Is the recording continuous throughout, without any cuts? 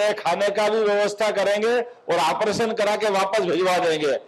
yes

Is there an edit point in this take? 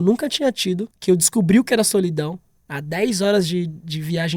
yes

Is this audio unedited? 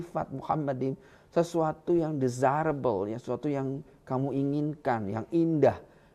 yes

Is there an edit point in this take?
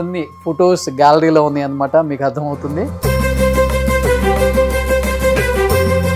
no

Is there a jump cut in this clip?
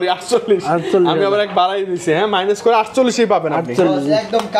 no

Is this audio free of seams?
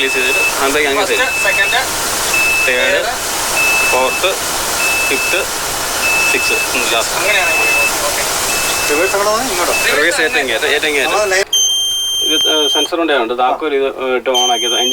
no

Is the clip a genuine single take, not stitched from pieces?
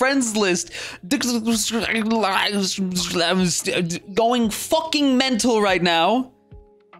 yes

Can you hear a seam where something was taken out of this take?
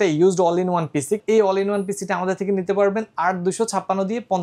yes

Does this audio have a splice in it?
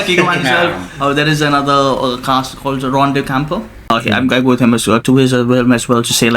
yes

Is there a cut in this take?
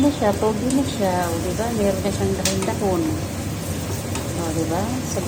no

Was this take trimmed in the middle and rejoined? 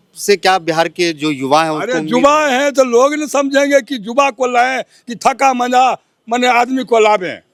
no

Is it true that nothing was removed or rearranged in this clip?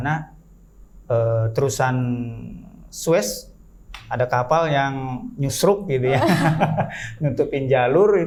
yes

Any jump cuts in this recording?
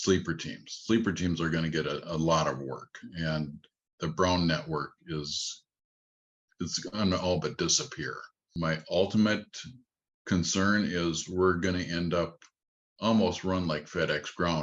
yes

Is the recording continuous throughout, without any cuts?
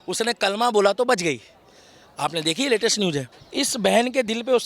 no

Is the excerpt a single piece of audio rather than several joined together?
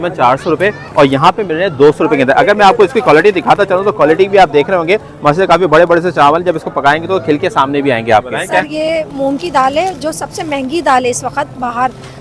no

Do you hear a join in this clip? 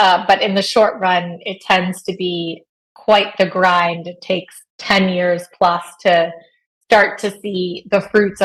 no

